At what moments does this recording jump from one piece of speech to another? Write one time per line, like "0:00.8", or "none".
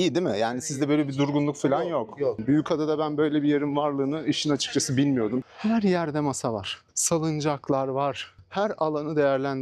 0:02.4
0:05.5